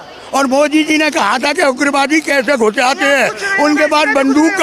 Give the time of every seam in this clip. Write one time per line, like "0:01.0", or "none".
none